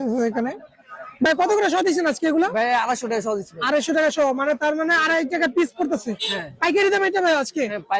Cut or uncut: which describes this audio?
cut